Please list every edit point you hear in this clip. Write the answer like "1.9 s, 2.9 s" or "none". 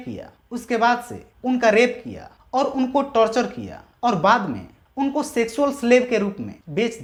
none